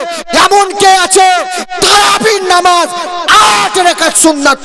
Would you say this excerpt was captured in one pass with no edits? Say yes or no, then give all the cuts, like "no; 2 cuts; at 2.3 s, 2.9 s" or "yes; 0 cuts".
yes; 0 cuts